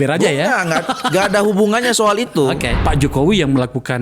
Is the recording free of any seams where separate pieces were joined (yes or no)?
no